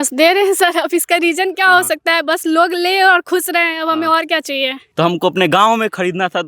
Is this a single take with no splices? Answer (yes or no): no